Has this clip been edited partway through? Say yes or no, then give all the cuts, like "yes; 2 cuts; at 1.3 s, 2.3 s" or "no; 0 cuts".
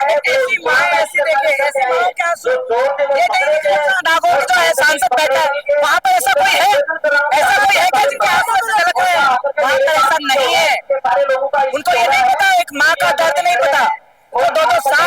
no; 0 cuts